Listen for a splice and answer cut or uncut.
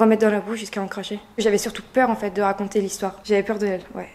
cut